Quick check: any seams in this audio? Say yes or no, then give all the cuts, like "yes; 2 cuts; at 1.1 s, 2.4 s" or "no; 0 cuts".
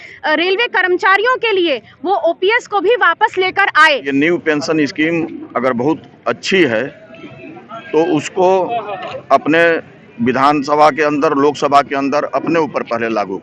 yes; 1 cut; at 4.1 s